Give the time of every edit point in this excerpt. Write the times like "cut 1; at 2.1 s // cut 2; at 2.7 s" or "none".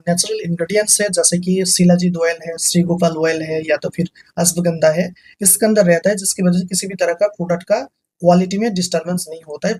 none